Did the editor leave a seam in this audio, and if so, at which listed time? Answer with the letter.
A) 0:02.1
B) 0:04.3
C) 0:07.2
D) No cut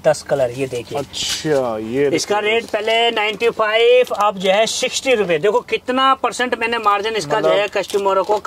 D